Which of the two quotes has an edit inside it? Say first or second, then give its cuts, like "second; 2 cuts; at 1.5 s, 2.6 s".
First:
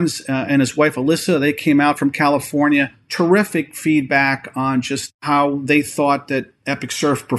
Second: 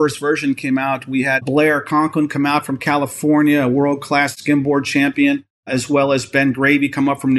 second; 2 cuts; at 1.4 s, 4.4 s